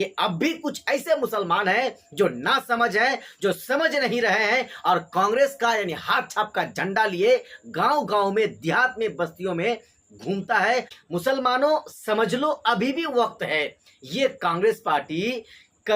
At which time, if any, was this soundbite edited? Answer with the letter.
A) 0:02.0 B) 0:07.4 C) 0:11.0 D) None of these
C